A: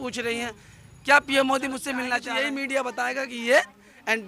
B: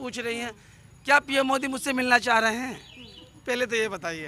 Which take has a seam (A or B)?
A